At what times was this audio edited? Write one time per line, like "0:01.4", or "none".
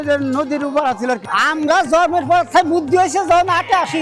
0:01.2